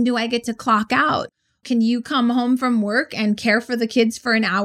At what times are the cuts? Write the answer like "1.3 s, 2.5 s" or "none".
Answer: none

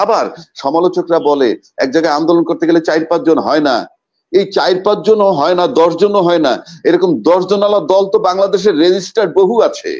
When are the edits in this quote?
none

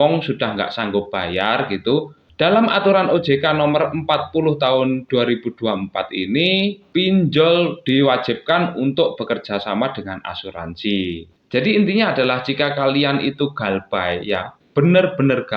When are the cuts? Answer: 2.2 s, 6.8 s, 11.3 s

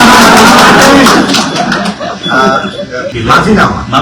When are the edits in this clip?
3.1 s

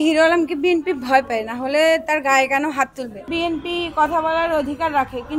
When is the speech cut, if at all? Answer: 3.3 s

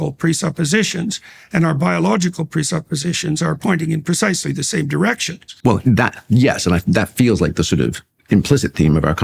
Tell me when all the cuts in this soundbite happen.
5.4 s

